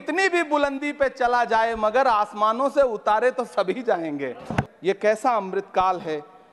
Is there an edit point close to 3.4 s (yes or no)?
no